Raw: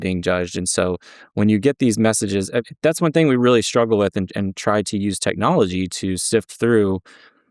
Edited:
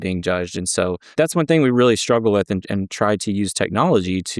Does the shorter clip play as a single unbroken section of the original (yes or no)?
no